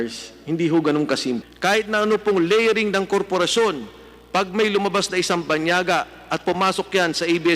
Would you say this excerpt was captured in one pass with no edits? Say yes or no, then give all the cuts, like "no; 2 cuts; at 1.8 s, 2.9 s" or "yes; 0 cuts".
no; 1 cut; at 1.4 s